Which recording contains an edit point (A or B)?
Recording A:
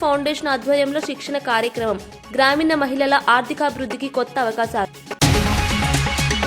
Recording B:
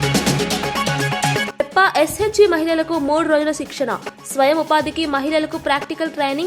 A